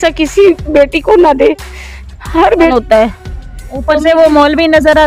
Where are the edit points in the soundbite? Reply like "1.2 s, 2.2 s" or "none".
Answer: 2.7 s